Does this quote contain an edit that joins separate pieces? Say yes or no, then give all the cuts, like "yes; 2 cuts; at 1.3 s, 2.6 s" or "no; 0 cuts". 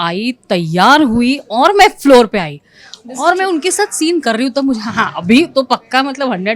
no; 0 cuts